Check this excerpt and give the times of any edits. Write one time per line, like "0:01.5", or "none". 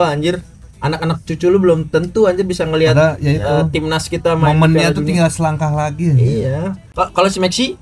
0:06.8